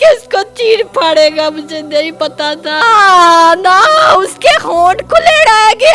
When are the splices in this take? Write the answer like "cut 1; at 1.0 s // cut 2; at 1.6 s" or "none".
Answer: cut 1; at 2.8 s